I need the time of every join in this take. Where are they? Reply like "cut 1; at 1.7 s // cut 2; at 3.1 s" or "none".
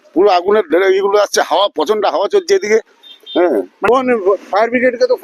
cut 1; at 3.9 s